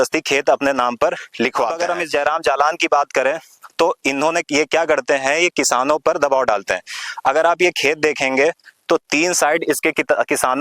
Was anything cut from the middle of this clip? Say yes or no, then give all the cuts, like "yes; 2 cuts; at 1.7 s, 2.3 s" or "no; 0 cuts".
no; 0 cuts